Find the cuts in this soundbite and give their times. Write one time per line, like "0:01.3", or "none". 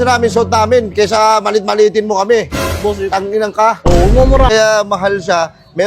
0:04.5